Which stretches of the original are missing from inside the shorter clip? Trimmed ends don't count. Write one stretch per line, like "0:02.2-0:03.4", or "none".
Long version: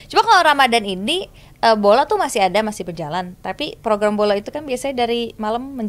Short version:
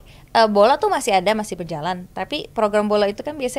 none